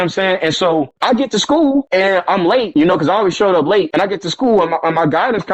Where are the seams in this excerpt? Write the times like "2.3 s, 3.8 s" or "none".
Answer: 0.9 s, 1.9 s, 2.7 s, 3.9 s